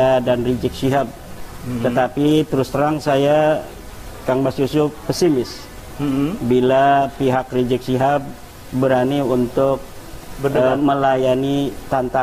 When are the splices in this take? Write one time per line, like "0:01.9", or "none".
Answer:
none